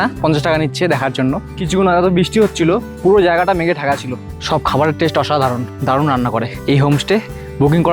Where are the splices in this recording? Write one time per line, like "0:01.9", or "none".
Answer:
0:01.4
0:04.3
0:05.7
0:06.6

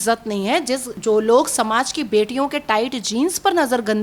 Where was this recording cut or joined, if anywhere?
0:00.9

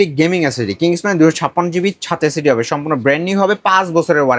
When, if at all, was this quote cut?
none

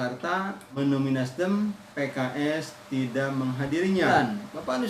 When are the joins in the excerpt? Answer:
0:00.8
0:01.9
0:04.1

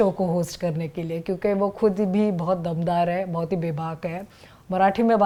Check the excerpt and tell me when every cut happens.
none

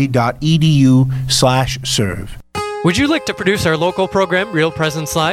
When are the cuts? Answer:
0:02.3

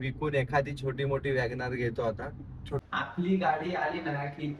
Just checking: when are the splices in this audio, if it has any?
0:02.8

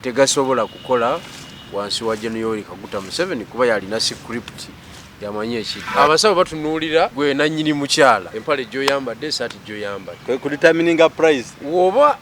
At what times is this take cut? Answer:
0:05.8
0:07.1
0:08.3

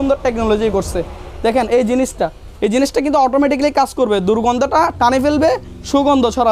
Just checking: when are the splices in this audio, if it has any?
none

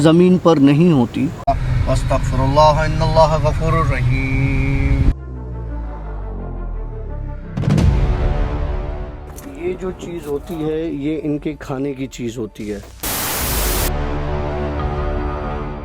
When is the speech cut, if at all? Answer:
0:01.4

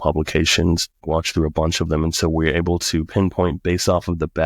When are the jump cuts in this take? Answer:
0:01.0

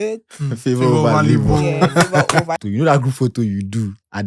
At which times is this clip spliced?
0:02.6

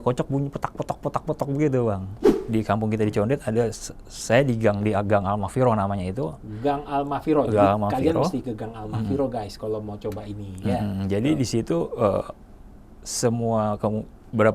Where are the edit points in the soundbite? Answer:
0:02.2

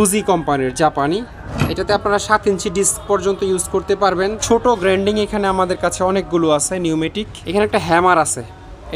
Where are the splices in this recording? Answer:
0:01.4
0:04.4
0:07.3

